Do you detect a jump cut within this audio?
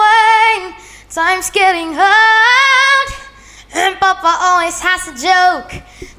no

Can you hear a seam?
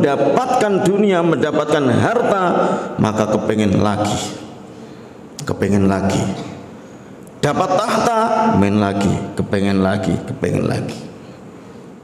no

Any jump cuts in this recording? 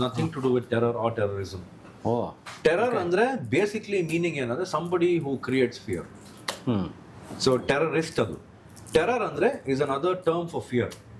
no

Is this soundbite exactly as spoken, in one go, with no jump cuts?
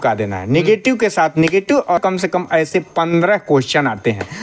no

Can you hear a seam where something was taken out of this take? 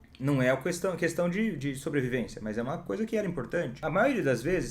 yes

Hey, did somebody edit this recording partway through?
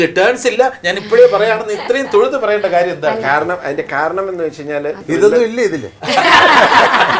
yes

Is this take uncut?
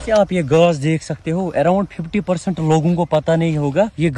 yes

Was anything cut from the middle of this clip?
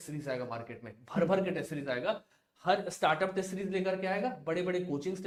no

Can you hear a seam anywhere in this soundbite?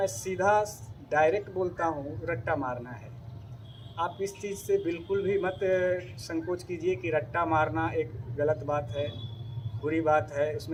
no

